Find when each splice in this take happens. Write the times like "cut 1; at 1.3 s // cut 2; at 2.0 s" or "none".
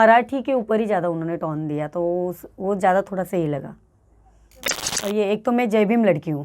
cut 1; at 4.9 s